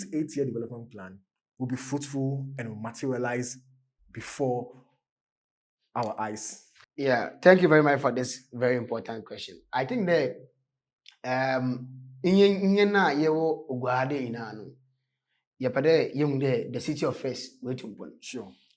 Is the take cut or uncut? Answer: uncut